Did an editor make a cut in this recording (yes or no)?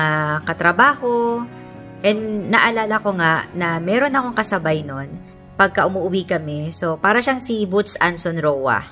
no